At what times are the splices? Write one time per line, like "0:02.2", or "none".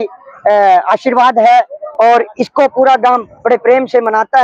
none